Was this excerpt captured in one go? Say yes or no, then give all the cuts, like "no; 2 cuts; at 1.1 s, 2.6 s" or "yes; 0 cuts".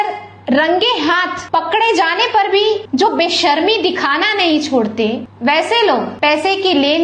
no; 4 cuts; at 1.3 s, 2.9 s, 5.3 s, 6.1 s